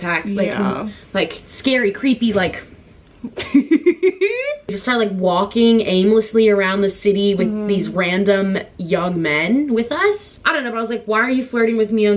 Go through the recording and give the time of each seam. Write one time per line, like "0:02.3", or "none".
0:04.8
0:10.3